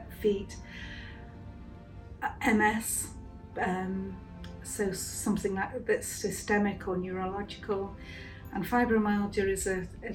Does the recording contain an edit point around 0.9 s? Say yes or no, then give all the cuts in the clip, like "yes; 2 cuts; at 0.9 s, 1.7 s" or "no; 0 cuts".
no; 0 cuts